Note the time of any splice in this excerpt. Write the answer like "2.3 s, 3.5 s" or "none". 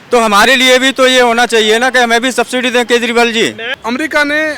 3.7 s